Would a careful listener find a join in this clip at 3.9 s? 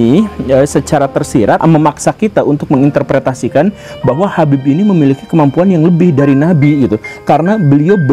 no; 1 cut; at 1.6 s

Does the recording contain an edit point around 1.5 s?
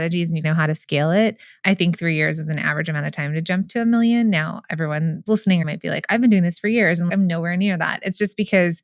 yes; 2 cuts; at 1.5 s, 5.7 s

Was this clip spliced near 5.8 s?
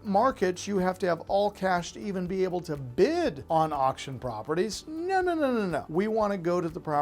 yes; 2 cuts; at 3.4 s, 5.8 s

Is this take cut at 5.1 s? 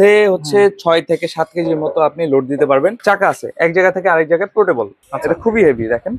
yes; 2 cuts; at 3.0 s, 5.1 s

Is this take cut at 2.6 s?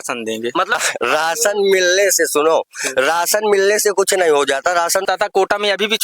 no; 2 cuts; at 0.8 s, 5.1 s

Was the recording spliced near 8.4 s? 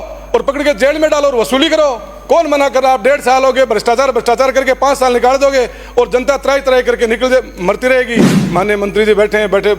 yes; 1 cut; at 8.4 s

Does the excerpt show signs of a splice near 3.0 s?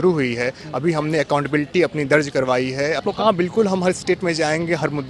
yes; 1 cut; at 3.0 s

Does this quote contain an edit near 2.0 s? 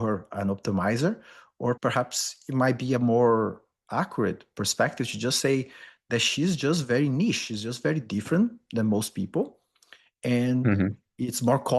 no; 0 cuts

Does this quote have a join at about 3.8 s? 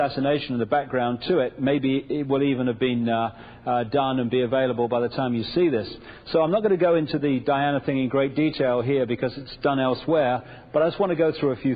yes; 1 cut; at 3.8 s

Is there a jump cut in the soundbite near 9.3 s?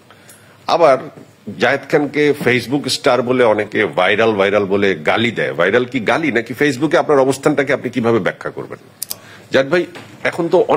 yes; 1 cut; at 9.3 s

